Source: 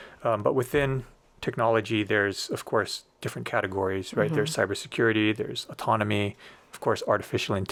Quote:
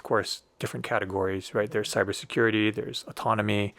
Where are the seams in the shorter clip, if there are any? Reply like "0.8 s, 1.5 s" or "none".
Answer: none